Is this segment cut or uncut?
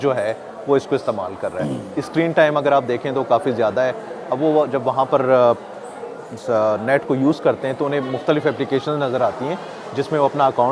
uncut